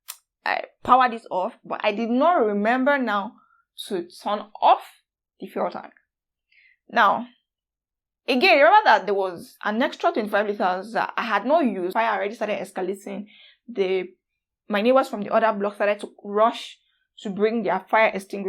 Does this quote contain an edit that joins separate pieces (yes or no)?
yes